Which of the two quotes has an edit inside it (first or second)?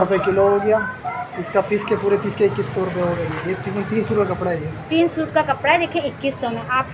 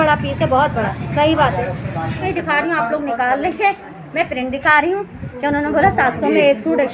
second